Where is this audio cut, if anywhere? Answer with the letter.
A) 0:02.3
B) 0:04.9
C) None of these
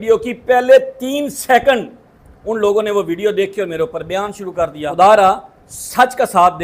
B